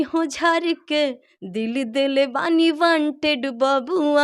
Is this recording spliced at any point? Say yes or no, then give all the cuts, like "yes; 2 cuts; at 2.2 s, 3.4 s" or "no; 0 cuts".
no; 0 cuts